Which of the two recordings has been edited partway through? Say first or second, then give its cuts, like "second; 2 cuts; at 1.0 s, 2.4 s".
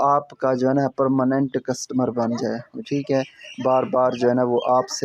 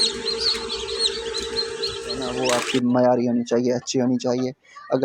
second; 1 cut; at 2.3 s